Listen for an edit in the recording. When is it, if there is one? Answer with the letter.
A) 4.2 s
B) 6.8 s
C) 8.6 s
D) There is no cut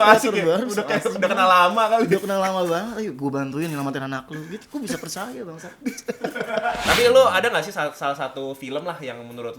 B